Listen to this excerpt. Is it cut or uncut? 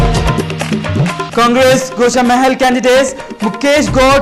uncut